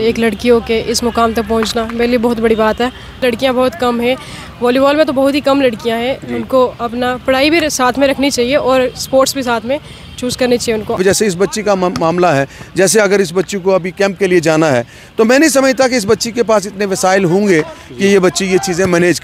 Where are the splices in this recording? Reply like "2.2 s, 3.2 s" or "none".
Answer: 3.2 s, 11.0 s